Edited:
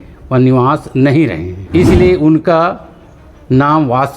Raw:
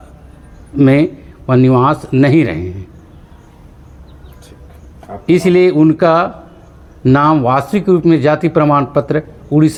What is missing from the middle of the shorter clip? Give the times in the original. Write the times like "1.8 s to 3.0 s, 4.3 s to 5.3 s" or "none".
2.7 s to 5.1 s

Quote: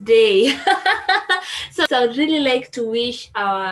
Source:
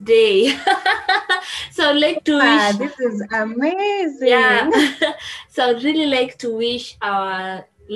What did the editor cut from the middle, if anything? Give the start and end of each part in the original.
1.7 s to 5.3 s

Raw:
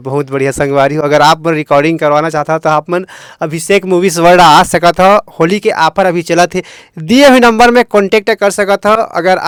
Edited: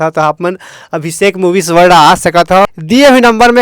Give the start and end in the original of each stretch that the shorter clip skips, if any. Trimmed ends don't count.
5.1 s to 6.8 s

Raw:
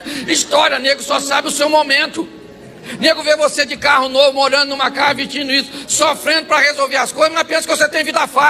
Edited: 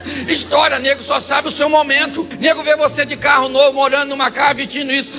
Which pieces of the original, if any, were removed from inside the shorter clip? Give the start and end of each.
2.2 s to 2.8 s

